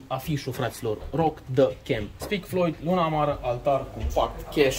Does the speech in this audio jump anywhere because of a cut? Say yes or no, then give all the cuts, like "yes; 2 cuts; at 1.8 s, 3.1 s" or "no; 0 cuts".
yes; 1 cut; at 2.1 s